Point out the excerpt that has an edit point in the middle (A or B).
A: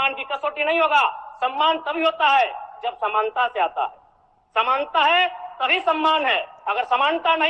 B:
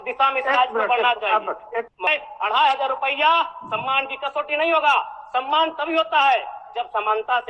B